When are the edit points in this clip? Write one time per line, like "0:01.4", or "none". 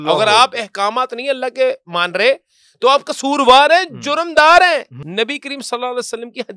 0:05.0